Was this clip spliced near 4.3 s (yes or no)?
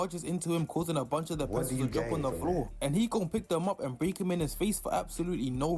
yes